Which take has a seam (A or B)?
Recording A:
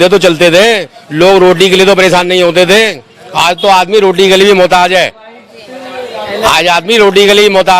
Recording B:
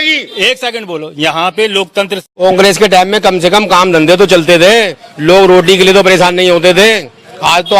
B